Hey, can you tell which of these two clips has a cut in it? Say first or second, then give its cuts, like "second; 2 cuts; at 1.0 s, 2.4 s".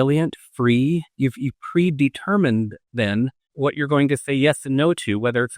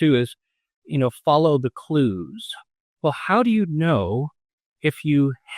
first; 1 cut; at 3.4 s